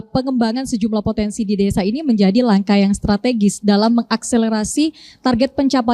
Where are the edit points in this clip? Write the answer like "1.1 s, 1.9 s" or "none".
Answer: none

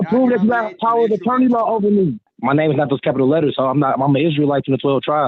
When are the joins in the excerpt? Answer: 2.3 s

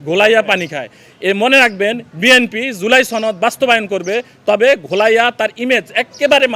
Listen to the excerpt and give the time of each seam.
none

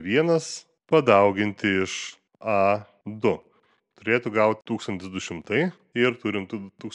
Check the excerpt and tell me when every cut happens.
3.0 s, 5.8 s

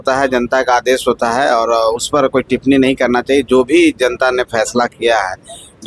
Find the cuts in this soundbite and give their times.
none

